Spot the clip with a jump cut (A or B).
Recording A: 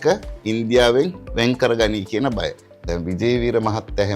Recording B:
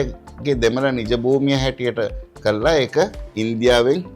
A